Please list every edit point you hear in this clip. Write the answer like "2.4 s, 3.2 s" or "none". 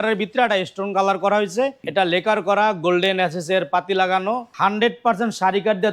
1.8 s, 4.5 s